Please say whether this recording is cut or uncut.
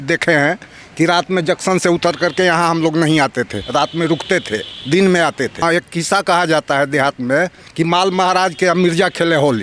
cut